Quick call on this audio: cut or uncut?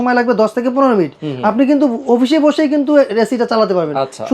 uncut